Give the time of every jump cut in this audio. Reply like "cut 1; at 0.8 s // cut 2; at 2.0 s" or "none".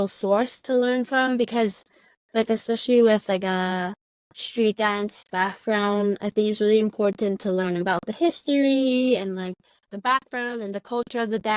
none